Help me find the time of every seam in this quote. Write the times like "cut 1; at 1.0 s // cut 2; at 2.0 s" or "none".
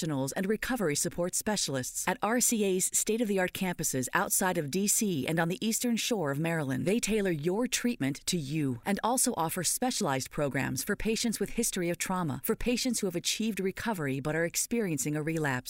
none